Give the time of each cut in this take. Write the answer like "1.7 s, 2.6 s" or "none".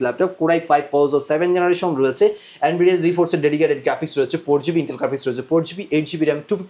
none